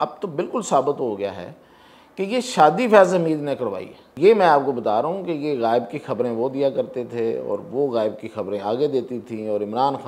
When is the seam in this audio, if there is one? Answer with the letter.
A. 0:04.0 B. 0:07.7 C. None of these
A